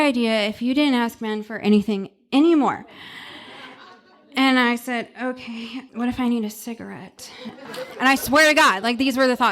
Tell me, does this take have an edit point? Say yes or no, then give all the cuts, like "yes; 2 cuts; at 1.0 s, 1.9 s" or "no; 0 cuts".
yes; 2 cuts; at 5.8 s, 7.7 s